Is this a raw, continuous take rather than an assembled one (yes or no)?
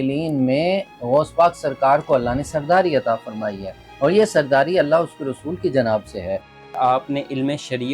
no